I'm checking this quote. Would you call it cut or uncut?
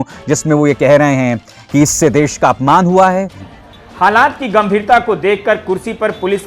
cut